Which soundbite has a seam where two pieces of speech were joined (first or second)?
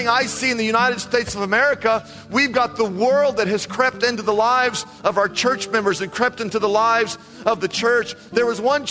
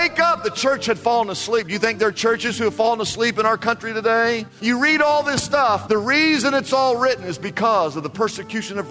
second